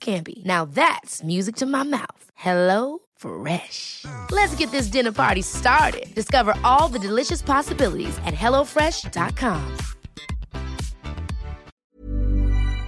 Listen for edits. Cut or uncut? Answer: cut